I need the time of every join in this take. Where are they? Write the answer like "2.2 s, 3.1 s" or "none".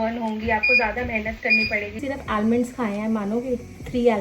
2.0 s